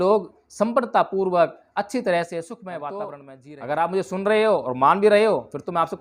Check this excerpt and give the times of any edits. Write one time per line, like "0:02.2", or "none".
0:03.3